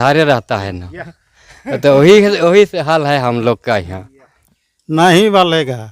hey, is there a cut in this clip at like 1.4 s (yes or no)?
no